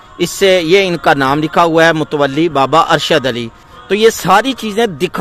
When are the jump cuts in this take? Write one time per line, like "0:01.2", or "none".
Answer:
0:04.0